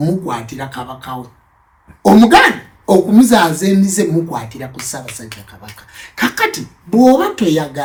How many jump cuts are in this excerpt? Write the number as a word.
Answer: zero